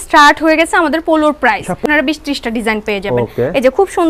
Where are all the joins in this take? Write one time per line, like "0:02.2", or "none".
0:01.8